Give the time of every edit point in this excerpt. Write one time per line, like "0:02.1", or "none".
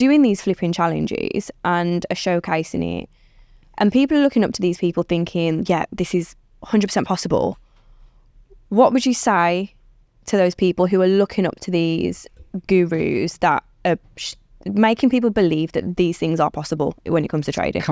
none